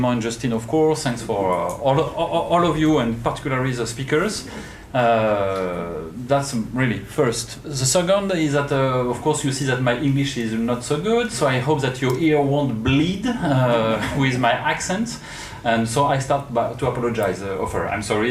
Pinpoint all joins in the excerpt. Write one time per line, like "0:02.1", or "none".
0:10.4